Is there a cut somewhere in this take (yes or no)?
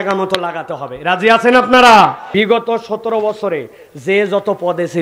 yes